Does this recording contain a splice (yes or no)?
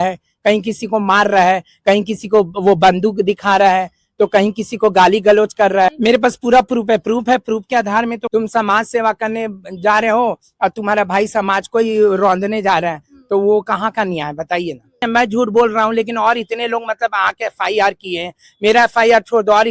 yes